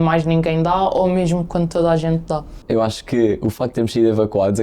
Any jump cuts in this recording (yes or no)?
yes